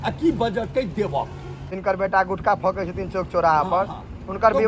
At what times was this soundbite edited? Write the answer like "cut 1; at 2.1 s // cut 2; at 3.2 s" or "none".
cut 1; at 1.7 s